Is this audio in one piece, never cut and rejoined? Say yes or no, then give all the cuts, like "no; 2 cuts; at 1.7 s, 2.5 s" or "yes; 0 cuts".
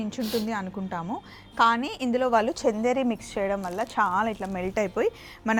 yes; 0 cuts